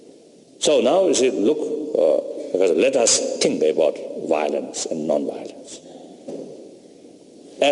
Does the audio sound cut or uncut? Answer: uncut